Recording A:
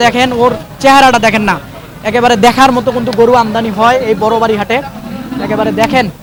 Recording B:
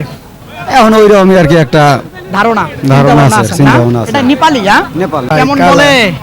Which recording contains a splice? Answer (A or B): B